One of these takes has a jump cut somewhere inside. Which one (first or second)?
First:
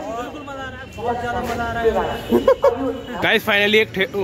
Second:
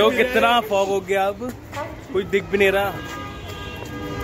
first